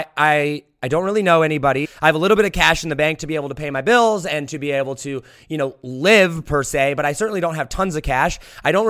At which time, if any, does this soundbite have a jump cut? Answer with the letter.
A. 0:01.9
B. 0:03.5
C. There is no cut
A